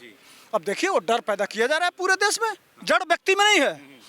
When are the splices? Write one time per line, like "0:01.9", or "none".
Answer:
0:02.7